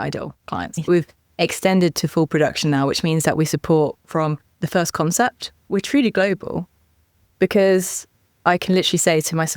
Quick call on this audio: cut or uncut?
cut